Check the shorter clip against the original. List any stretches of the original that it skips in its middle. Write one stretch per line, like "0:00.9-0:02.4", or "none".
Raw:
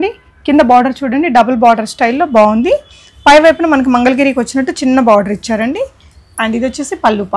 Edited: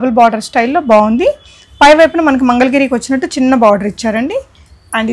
none